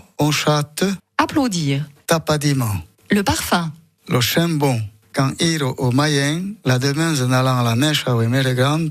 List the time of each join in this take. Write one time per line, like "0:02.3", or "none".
0:01.0